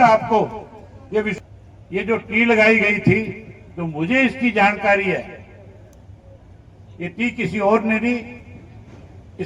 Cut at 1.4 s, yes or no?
yes